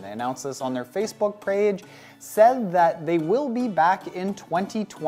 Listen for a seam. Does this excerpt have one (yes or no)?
yes